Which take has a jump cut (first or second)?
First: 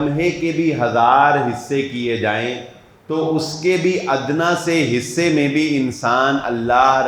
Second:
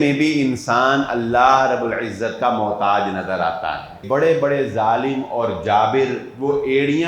second